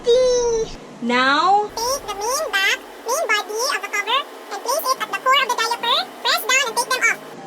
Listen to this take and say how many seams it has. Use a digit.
0